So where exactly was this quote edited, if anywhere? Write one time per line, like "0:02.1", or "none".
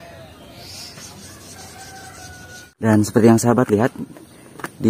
0:02.8